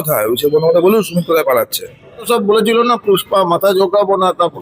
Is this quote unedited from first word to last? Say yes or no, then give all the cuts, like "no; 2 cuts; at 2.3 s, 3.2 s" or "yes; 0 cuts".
no; 1 cut; at 2.3 s